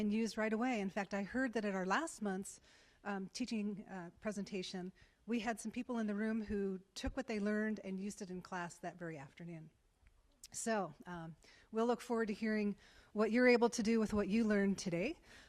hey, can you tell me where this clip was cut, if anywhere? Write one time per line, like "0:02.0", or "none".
0:01.9